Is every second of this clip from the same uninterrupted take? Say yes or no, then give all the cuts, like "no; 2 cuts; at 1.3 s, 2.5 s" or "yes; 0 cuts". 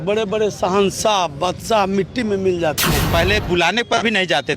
no; 1 cut; at 3.1 s